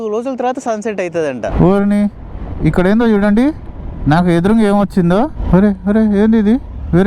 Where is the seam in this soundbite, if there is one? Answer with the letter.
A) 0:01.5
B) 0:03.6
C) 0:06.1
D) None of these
A